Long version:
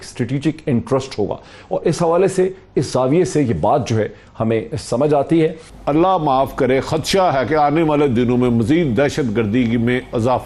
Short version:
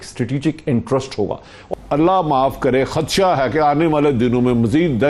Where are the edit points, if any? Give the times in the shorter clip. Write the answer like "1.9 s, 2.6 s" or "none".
1.7 s